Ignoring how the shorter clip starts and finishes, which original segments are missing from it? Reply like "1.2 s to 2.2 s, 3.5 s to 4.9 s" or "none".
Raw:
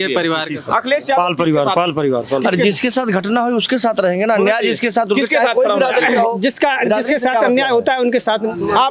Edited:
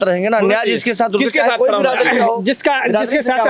none